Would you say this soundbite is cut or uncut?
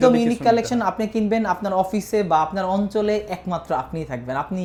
uncut